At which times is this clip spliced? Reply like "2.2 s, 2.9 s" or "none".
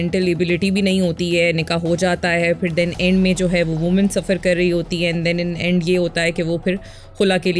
none